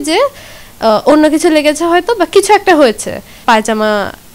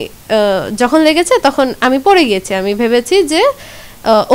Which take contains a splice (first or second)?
first